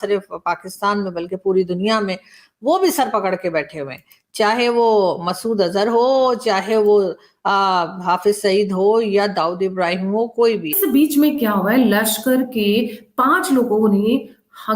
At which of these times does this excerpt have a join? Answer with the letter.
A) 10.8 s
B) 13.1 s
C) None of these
A